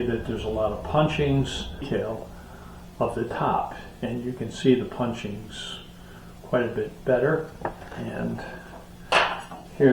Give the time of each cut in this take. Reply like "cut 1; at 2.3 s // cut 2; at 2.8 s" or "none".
cut 1; at 1.9 s